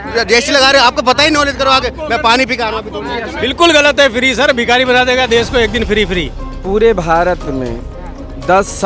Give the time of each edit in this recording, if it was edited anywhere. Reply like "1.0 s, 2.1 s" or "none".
3.3 s, 6.6 s